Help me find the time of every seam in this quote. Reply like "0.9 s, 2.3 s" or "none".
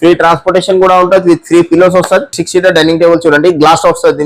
2.3 s